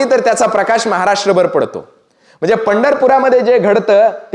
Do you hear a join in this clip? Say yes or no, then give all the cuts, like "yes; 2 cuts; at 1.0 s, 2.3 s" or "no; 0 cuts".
no; 0 cuts